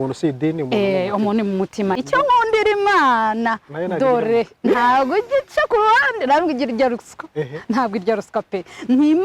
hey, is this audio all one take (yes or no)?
no